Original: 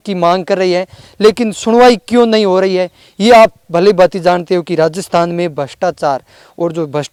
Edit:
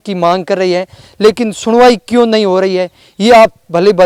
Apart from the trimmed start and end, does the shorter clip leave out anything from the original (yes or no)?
no